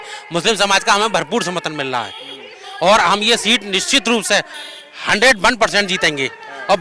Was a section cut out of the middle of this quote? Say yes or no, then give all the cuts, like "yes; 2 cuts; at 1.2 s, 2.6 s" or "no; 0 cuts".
no; 0 cuts